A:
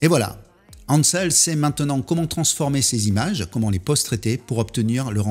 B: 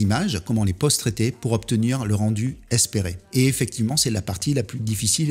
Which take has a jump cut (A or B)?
B